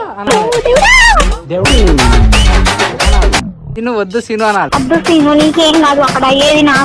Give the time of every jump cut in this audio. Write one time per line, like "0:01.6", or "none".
0:03.6